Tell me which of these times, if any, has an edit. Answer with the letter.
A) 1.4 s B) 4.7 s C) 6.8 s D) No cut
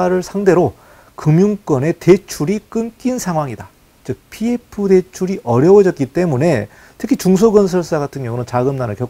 D